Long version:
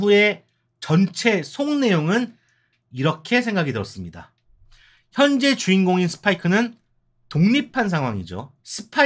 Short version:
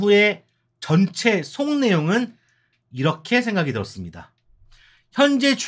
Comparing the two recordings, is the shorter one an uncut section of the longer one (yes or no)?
yes